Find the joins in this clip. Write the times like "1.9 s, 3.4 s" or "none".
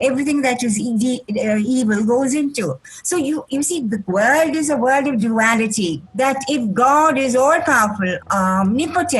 6.0 s, 8.2 s